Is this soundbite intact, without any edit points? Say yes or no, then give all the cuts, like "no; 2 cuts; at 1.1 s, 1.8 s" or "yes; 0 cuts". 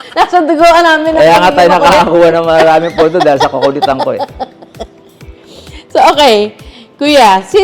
yes; 0 cuts